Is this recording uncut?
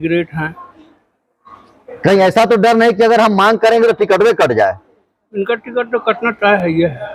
yes; 0 cuts

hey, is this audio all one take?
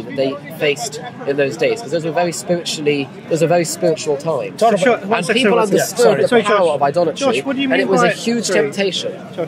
yes; 0 cuts

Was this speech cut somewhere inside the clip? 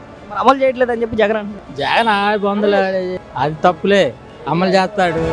yes; 2 cuts; at 3.1 s, 4.3 s

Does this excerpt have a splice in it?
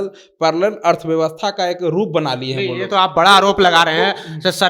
no; 0 cuts

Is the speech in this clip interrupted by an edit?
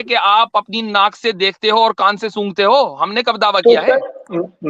no; 0 cuts

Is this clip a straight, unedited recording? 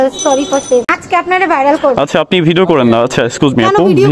no; 1 cut; at 1.0 s

